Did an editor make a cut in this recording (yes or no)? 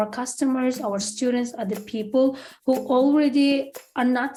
no